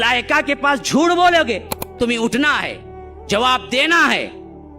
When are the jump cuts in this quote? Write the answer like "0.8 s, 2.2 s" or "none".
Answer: 1.9 s